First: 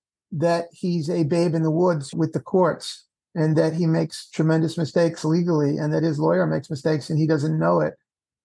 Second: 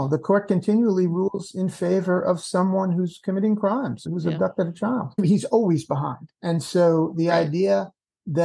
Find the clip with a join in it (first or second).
second